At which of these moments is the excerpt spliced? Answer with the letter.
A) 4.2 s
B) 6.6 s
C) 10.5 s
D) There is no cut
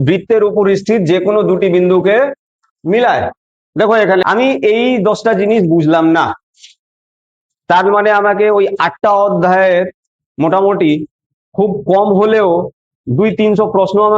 A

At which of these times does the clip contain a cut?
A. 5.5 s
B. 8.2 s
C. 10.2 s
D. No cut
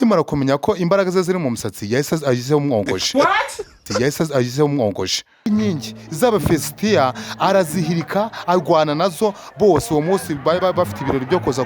A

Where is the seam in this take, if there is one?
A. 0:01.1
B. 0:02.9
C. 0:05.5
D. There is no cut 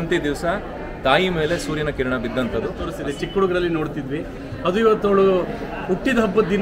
B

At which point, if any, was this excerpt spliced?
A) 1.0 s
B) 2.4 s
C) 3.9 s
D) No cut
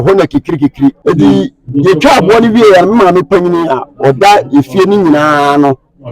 A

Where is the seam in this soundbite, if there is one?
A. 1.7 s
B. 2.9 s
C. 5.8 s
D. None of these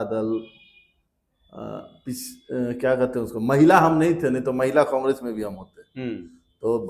D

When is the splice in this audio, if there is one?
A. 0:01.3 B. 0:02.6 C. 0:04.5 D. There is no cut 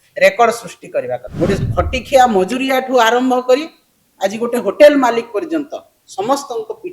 A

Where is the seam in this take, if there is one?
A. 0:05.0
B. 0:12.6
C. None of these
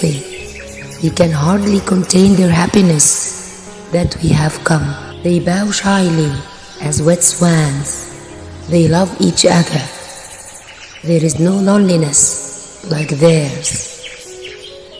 A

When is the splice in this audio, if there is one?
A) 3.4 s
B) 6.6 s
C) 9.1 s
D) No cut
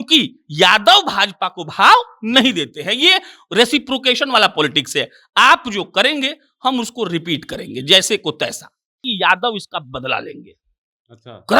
C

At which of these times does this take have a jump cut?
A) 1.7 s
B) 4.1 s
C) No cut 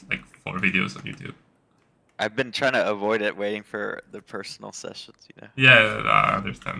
C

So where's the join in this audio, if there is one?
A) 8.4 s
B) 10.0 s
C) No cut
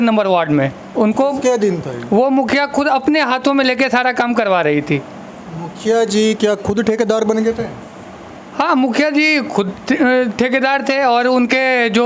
C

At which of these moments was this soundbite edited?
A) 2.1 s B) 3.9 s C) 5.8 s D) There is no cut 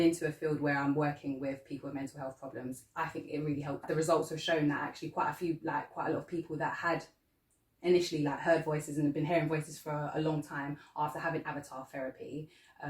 B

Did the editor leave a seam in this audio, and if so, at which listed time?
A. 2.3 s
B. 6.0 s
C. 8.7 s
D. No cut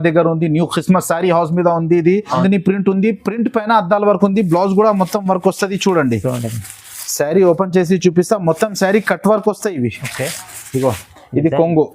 A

